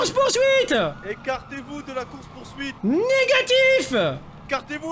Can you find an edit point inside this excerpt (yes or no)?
yes